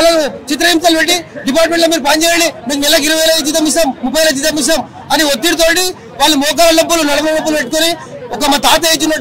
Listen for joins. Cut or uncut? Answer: uncut